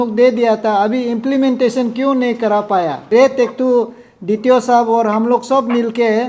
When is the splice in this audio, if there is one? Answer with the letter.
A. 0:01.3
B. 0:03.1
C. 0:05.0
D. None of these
B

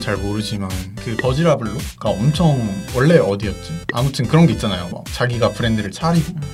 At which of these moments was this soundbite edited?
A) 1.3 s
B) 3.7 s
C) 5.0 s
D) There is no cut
D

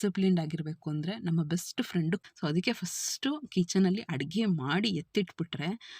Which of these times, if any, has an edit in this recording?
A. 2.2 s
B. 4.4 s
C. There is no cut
A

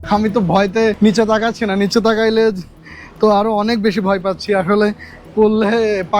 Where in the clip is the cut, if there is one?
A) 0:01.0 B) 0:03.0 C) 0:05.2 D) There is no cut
A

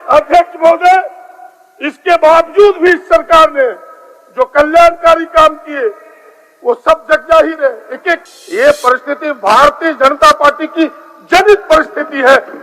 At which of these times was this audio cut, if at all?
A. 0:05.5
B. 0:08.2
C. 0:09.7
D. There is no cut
B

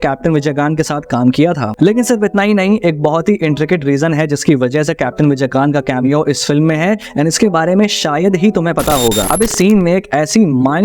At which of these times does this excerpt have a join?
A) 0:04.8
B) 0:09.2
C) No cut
B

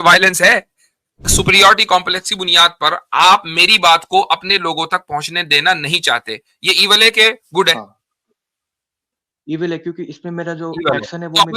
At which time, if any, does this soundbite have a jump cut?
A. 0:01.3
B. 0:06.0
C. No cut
A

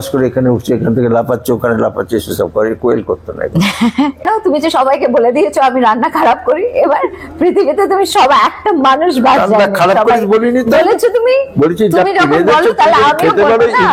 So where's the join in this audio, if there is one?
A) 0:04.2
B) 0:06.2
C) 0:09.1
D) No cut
A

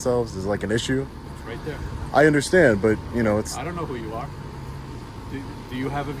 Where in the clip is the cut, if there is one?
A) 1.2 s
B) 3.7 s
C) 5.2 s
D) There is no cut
D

